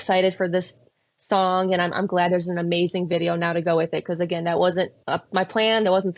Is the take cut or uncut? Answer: cut